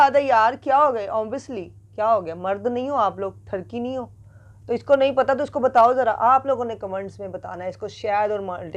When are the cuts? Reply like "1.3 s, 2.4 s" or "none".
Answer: none